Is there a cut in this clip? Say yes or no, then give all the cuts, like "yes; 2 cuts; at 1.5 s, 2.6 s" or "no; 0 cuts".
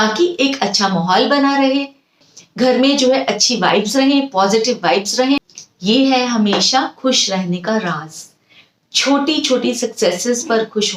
yes; 2 cuts; at 2.2 s, 5.6 s